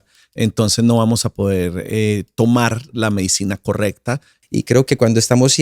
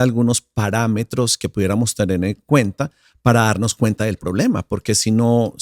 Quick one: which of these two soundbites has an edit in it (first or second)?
first